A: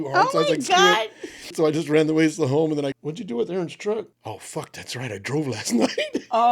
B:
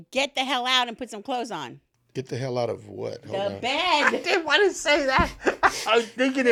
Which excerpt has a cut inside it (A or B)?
A